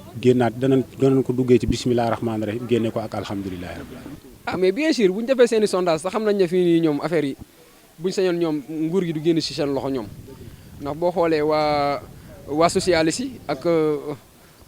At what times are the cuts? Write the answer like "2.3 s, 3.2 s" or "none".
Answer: 4.0 s